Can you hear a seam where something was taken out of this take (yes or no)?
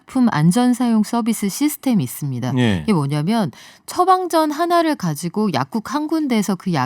no